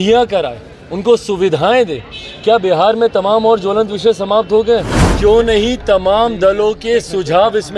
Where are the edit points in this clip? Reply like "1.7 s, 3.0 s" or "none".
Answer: 5.0 s